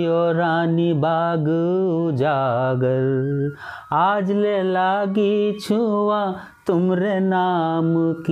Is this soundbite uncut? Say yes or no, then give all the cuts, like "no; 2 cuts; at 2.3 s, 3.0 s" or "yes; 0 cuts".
yes; 0 cuts